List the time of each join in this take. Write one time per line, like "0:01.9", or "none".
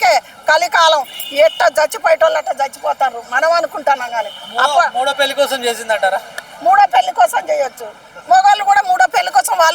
none